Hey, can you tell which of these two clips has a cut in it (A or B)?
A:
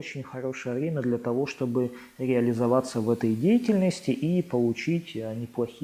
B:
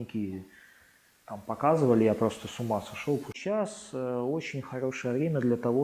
B